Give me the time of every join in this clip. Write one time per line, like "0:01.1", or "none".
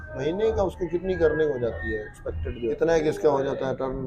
0:02.7